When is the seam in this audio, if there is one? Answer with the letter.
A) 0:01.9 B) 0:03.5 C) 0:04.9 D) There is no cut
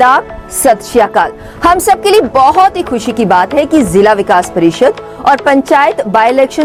D